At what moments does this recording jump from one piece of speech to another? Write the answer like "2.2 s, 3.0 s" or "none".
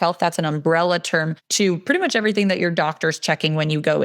1.4 s

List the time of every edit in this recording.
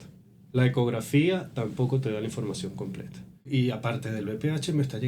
3.5 s

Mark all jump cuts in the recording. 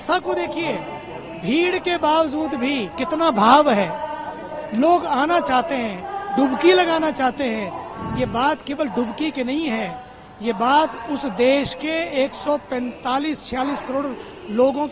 7.8 s

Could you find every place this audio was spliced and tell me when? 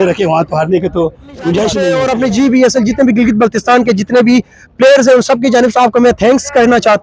2.0 s

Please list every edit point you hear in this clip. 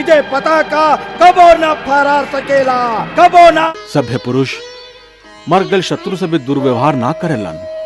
3.7 s

